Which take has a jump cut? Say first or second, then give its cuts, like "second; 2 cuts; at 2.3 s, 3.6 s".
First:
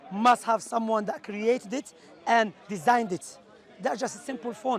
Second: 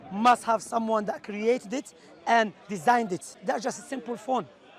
second; 1 cut; at 3.3 s